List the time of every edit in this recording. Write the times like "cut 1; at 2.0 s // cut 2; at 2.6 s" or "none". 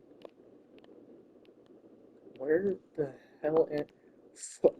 none